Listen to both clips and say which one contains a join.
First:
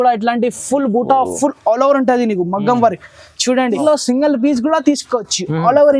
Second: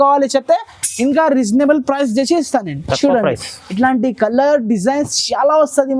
first; 1 cut; at 3.8 s

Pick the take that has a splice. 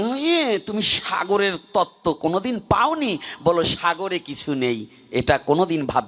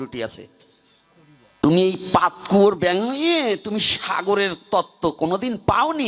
second; 1 cut; at 1.6 s

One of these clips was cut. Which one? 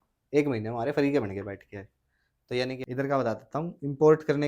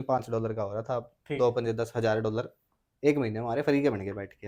first; 1 cut; at 2.8 s

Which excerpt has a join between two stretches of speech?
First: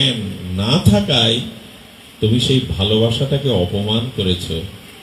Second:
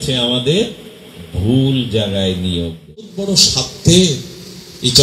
second; 1 cut; at 3.2 s

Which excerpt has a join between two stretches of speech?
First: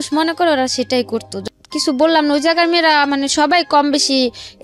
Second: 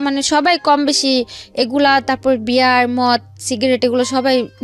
first; 1 cut; at 1.3 s

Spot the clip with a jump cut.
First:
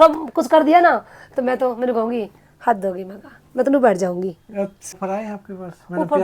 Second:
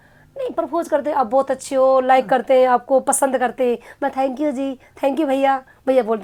first; 1 cut; at 4.9 s

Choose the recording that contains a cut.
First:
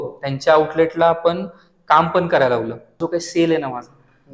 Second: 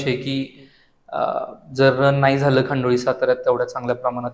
first; 1 cut; at 3.0 s

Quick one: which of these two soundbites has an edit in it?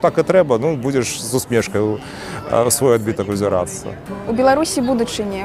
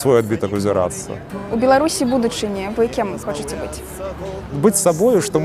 second; 1 cut; at 4.5 s

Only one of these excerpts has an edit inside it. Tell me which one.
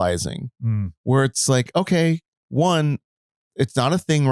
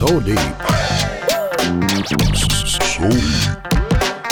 first; 1 cut; at 2.4 s

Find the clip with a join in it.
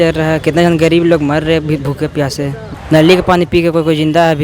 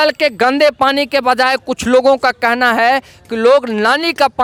first; 1 cut; at 2.7 s

